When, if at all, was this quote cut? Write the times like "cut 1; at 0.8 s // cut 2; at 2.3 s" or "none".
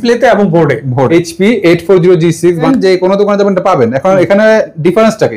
cut 1; at 1.1 s // cut 2; at 2.7 s